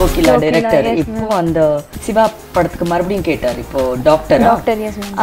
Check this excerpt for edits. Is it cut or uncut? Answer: uncut